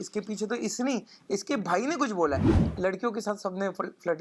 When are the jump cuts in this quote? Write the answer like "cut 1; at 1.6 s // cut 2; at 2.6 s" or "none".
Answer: cut 1; at 2.6 s

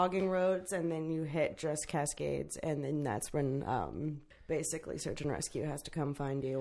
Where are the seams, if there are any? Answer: cut 1; at 4.3 s

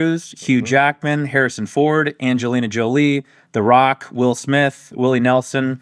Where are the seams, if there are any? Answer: none

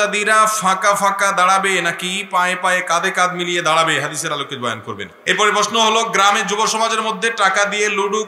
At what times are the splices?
cut 1; at 5.1 s

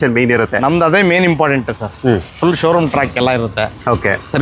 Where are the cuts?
none

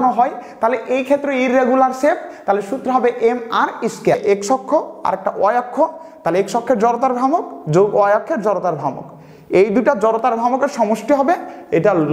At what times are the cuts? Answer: cut 1; at 4.2 s

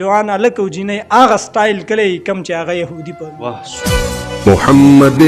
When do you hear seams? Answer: cut 1; at 3.7 s

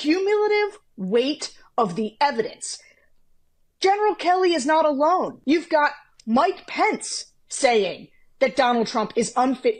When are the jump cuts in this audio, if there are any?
cut 1; at 5.3 s

